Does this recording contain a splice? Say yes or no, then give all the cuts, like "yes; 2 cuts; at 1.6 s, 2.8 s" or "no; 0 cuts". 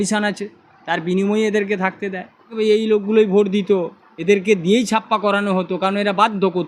yes; 1 cut; at 2.5 s